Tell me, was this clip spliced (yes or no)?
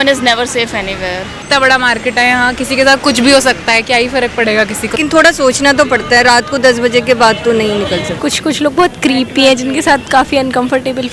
yes